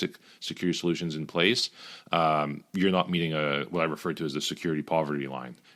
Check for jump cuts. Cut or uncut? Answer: uncut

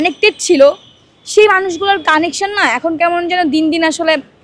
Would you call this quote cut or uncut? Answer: uncut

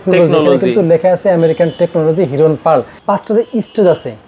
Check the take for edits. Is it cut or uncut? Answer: cut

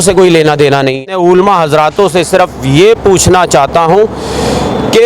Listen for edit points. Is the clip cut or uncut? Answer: cut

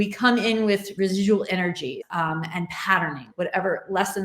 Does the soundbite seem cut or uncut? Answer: cut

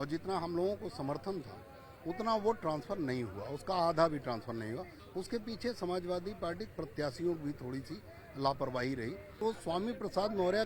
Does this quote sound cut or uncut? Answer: cut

